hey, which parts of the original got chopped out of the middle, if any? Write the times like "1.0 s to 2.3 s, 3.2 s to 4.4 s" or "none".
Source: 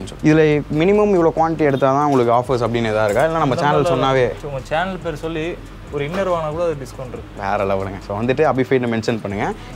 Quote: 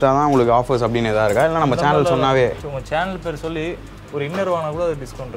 none

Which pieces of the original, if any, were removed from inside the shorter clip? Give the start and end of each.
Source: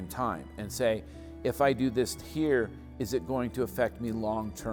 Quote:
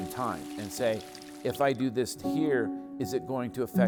none

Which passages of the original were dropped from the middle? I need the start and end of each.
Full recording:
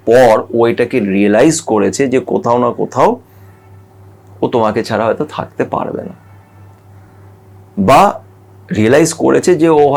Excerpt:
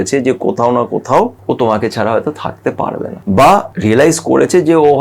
3.2 s to 4.3 s, 6.1 s to 7.7 s, 8.2 s to 8.7 s

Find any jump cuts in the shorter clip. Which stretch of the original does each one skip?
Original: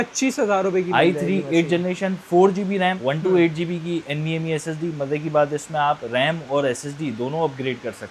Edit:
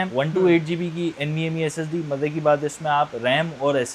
none

